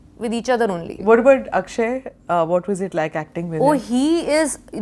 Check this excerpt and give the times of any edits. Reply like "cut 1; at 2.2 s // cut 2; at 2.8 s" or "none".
cut 1; at 0.9 s